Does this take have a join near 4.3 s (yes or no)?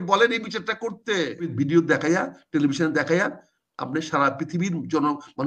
no